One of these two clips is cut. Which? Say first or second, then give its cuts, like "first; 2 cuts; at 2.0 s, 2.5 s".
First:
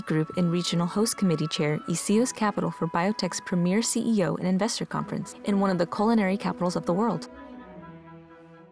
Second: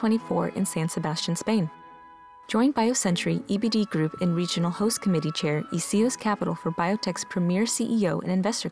first; 1 cut; at 7.2 s